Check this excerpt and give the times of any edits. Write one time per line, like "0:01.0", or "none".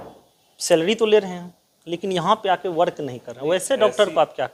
none